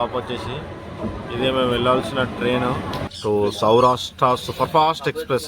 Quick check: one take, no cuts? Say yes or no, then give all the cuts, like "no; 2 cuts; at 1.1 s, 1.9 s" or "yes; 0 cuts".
no; 1 cut; at 3.0 s